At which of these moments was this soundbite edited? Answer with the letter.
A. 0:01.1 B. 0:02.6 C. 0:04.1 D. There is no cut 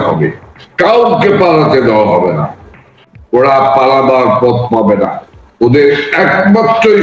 B